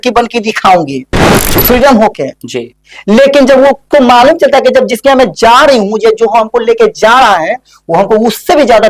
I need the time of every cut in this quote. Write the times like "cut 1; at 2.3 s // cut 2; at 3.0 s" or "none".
none